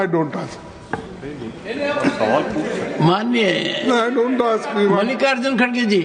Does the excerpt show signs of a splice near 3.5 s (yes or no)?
no